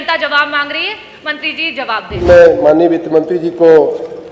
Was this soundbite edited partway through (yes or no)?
yes